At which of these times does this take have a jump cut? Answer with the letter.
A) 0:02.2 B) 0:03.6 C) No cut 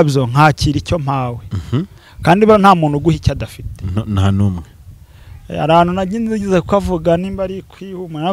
C